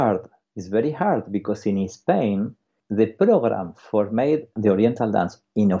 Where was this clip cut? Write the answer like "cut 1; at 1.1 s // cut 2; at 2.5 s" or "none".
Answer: cut 1; at 2.8 s // cut 2; at 4.6 s